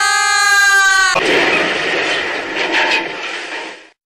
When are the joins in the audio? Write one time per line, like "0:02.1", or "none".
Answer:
0:01.1